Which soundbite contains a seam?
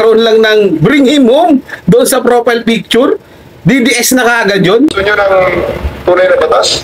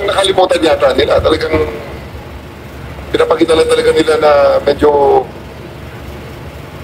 first; 1 cut; at 5.0 s

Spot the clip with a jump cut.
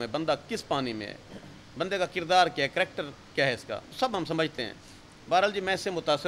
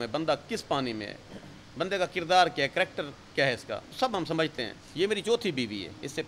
second; 1 cut; at 4.8 s

